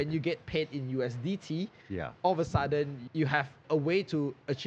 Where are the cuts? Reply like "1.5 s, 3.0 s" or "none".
3.4 s